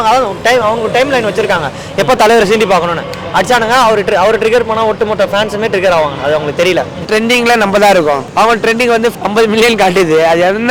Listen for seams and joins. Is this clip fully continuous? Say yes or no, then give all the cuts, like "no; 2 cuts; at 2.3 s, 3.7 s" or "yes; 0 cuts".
no; 3 cuts; at 7.1 s, 8.3 s, 9.2 s